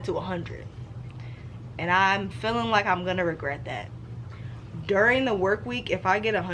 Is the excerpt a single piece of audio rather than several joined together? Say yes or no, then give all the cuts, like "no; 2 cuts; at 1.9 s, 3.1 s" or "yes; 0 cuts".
no; 1 cut; at 3.9 s